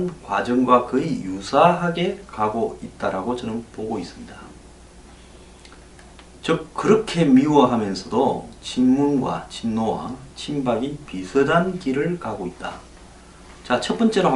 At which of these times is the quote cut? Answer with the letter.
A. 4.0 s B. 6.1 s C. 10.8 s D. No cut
C